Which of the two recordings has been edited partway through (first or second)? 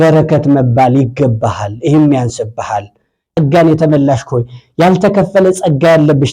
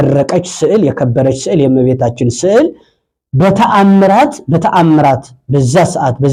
first